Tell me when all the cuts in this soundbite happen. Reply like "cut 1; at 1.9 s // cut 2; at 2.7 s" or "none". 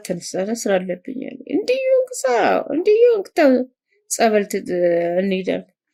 none